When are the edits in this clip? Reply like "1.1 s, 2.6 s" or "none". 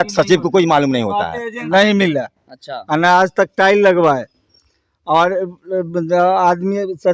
1.7 s